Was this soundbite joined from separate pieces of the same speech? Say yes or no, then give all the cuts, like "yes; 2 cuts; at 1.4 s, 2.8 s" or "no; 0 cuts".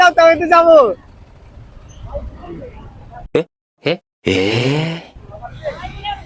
no; 0 cuts